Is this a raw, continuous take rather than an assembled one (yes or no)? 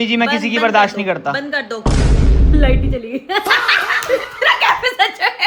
yes